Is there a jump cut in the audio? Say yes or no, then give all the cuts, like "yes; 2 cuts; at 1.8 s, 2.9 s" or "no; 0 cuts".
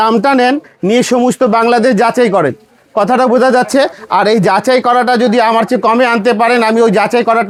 no; 0 cuts